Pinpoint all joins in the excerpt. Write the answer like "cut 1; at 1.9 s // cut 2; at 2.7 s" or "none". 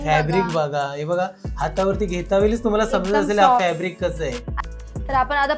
cut 1; at 4.5 s